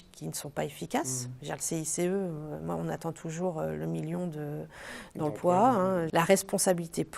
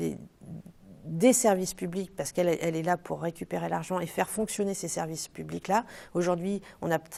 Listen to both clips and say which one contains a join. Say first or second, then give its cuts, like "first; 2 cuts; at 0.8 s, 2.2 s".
first; 1 cut; at 6.1 s